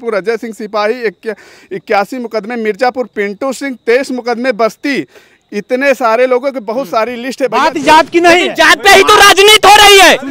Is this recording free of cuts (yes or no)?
no